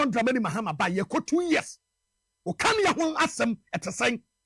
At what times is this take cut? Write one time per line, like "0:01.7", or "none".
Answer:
none